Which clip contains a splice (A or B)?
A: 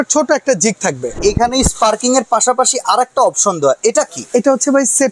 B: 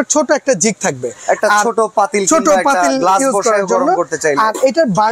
A